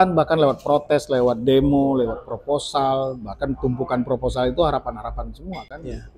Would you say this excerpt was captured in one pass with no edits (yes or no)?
yes